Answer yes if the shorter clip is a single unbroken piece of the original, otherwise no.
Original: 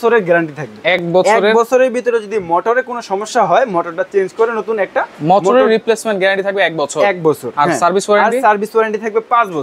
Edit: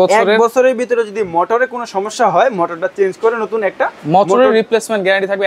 yes